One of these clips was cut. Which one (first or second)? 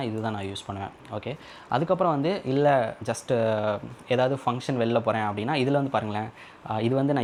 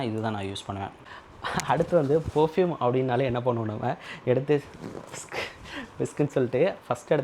second